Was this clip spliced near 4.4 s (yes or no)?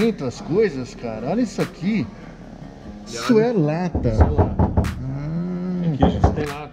no